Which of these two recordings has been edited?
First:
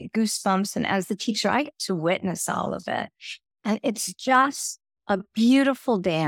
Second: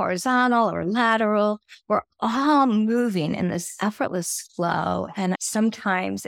second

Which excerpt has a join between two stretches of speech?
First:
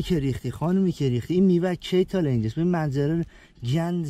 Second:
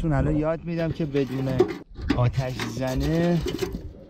second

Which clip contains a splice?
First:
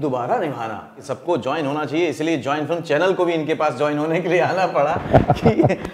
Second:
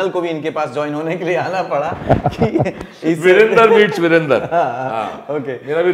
first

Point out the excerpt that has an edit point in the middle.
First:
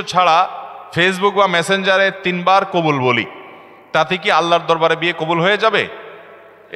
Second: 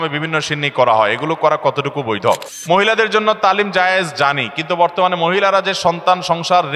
second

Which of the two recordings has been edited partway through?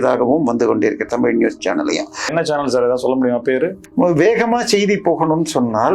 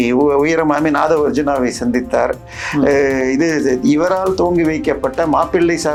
first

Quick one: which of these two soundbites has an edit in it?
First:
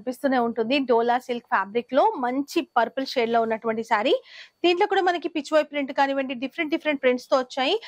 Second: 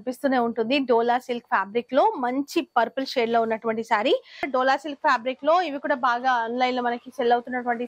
second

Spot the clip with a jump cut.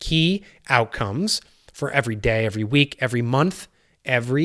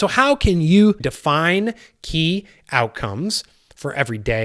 second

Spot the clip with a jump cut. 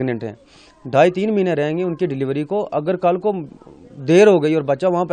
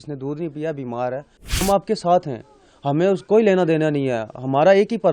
second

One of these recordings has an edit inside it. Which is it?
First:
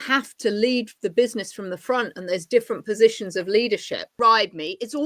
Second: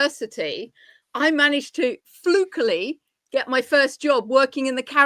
first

